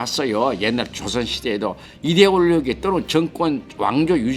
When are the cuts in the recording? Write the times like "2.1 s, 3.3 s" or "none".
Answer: 1.9 s